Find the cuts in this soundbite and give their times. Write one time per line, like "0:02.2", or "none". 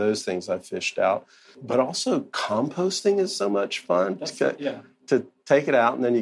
0:01.6